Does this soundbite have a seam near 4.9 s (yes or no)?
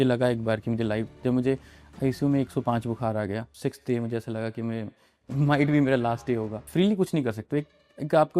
no